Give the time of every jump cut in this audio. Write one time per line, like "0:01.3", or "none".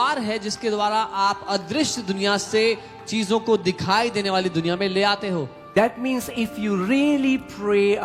0:05.6

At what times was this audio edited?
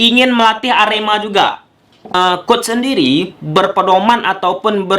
0:02.1

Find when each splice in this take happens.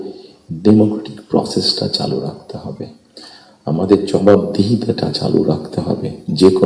none

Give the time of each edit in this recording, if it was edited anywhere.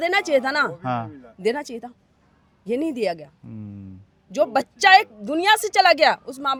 none

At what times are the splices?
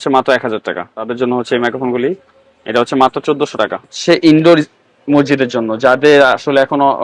0:01.0
0:04.0

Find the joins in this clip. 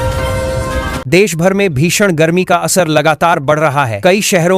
0:01.0

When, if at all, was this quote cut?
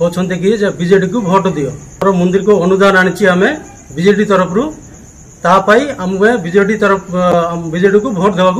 0:01.4

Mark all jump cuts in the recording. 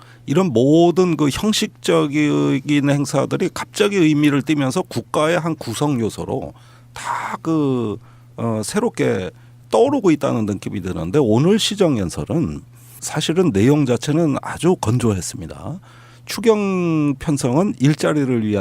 0:02.3

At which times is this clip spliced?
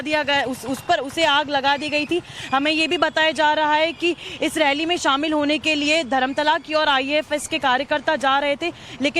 none

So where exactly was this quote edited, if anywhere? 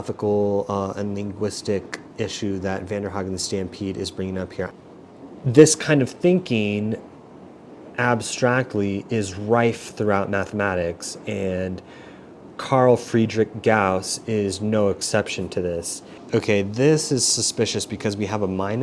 0:04.7
0:16.1

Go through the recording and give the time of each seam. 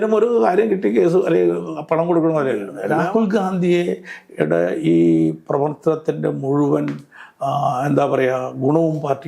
0:02.8

